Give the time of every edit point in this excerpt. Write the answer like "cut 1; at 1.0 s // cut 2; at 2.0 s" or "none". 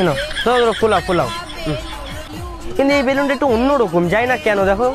cut 1; at 2.2 s